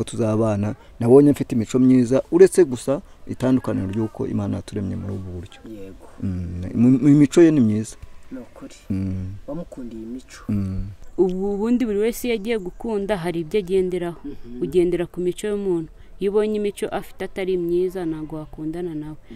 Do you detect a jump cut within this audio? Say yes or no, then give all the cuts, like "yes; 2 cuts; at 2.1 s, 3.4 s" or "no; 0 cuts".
yes; 1 cut; at 11.0 s